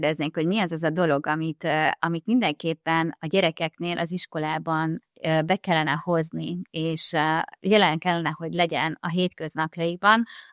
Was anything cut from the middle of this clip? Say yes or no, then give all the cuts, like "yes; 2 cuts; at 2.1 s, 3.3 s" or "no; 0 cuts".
no; 0 cuts